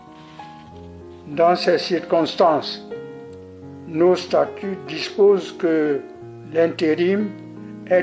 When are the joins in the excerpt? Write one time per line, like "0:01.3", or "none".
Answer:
0:01.2

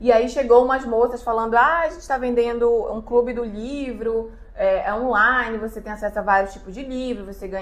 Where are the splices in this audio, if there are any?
none

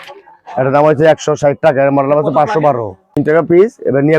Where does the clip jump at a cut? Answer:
0:03.2

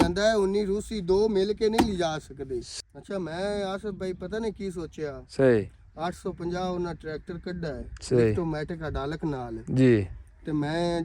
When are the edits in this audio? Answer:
0:02.7

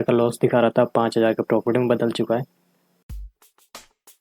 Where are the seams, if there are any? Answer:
0:03.0

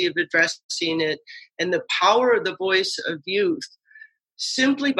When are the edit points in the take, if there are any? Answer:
none

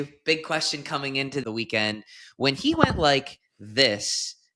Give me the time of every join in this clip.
0:01.4

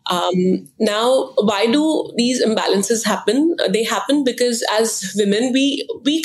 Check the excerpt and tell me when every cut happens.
none

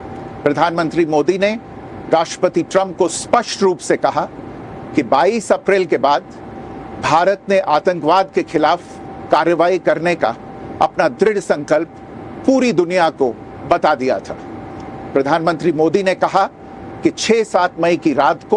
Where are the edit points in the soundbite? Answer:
none

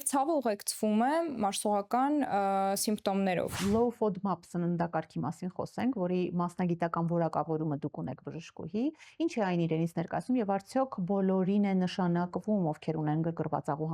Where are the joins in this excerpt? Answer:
0:03.5

